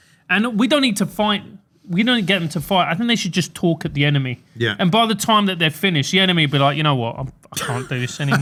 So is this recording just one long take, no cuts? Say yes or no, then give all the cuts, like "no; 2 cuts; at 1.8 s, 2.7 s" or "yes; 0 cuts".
yes; 0 cuts